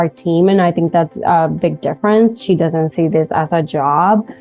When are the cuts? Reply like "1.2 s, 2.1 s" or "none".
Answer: none